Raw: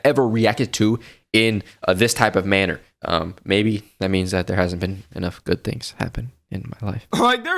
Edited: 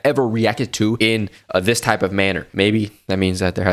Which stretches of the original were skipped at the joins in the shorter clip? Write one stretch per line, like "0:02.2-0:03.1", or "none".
0:01.0-0:01.3
0:02.8-0:03.4